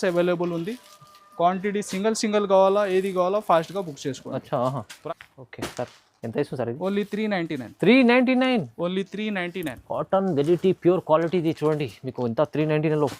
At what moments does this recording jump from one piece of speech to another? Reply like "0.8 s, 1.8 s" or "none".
4.9 s